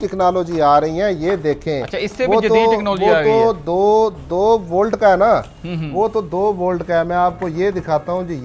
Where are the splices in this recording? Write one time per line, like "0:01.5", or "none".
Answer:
none